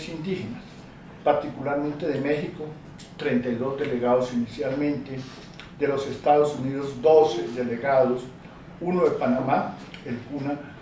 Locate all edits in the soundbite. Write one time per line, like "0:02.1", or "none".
0:05.7